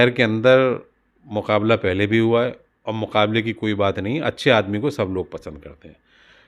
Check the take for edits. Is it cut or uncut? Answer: uncut